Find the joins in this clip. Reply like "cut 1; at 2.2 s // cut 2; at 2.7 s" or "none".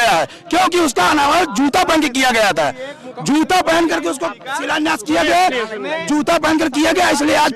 none

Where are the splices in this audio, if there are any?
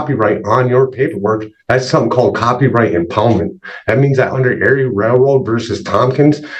none

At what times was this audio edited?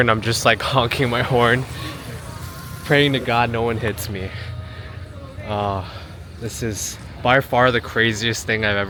none

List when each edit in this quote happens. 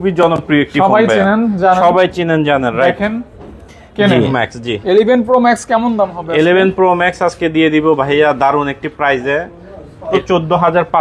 cut 1; at 4.3 s // cut 2; at 10.1 s

